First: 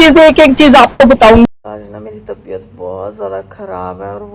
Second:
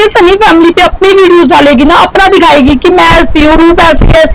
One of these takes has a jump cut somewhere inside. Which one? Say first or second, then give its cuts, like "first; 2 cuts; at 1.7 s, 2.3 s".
first; 1 cut; at 1.7 s